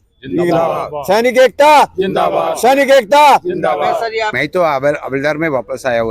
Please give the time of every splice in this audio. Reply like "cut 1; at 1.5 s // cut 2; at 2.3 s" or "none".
cut 1; at 4.2 s